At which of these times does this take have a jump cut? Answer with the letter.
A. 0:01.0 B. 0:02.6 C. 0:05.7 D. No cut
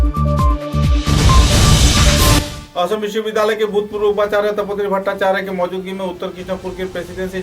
B